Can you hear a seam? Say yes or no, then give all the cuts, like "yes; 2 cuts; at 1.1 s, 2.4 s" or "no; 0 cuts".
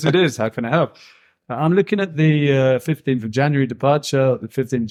no; 0 cuts